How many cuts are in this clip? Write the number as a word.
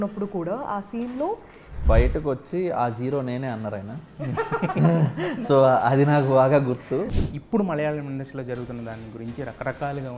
two